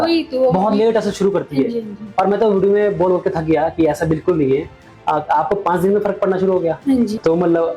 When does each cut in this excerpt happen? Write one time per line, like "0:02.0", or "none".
none